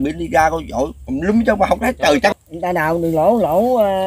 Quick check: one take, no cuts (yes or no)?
no